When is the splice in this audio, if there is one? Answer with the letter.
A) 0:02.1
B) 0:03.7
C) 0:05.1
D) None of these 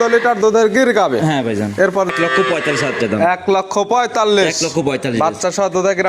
A